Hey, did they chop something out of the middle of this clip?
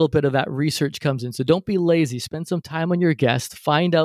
no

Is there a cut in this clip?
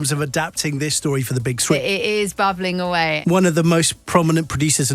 yes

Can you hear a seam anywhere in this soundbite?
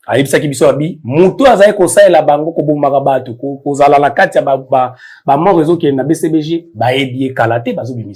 no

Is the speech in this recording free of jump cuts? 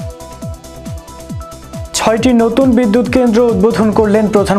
no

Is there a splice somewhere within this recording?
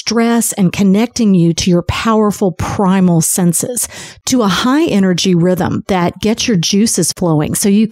no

